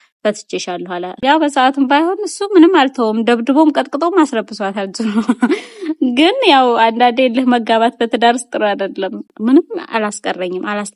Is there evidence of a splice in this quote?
yes; 2 cuts; at 1.2 s, 9.2 s

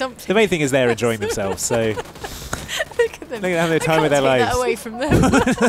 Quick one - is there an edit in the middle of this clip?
no; 0 cuts

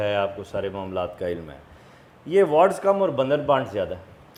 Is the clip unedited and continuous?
yes; 0 cuts

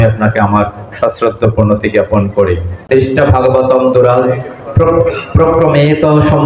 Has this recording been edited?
yes; 1 cut; at 2.7 s

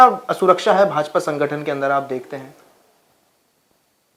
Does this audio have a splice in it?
no; 0 cuts

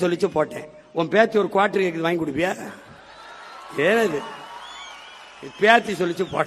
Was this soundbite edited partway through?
no; 0 cuts

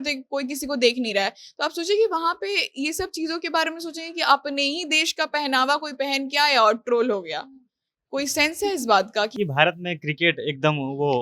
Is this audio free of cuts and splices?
no; 1 cut; at 9.3 s

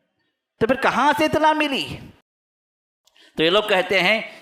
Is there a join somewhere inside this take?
yes; 1 cut; at 2.4 s

